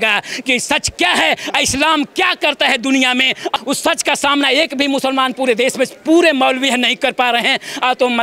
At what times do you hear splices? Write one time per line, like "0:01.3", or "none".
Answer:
0:03.5